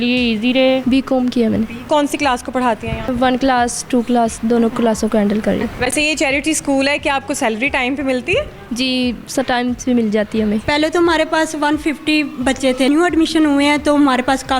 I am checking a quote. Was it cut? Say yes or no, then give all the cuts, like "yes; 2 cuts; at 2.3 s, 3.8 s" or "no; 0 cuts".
yes; 6 cuts; at 0.8 s, 1.8 s, 3.1 s, 5.7 s, 10.6 s, 12.9 s